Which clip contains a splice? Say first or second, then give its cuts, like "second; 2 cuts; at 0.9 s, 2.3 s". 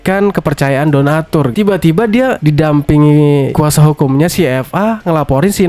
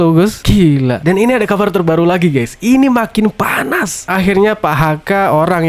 first; 2 cuts; at 1.5 s, 2.4 s